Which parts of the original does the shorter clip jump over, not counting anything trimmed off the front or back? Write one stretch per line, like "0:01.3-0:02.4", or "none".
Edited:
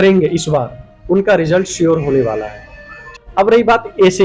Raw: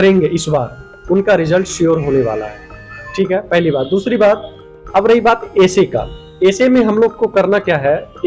0:03.0-0:04.5

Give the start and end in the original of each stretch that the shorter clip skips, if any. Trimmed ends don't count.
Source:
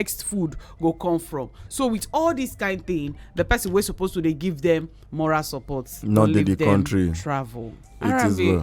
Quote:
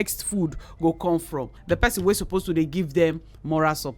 0:01.5-0:03.2

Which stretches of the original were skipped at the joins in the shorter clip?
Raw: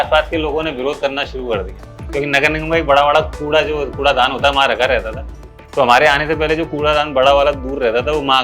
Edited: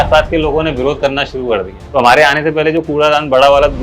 0:01.8-0:05.6

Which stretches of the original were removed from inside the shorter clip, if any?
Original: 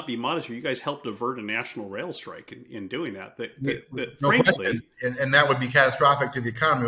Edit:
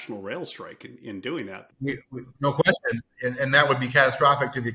0:03.4-0:03.5

